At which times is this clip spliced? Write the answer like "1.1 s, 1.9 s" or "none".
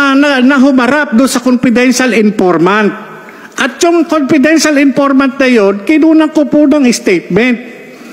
none